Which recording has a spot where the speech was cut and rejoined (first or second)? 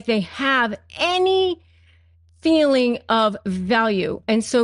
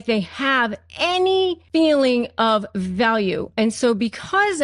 second